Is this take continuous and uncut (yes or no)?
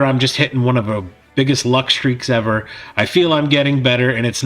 yes